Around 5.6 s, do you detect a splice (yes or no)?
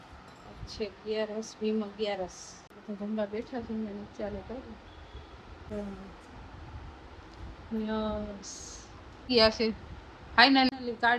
yes